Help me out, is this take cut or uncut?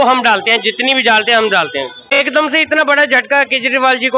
cut